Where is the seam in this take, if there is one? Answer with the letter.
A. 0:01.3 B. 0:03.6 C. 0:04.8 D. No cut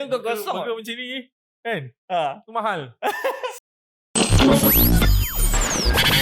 B